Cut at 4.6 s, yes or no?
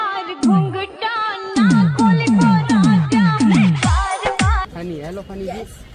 yes